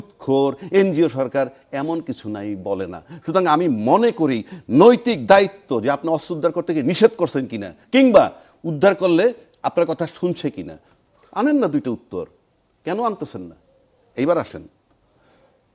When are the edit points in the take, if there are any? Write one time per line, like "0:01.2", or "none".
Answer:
none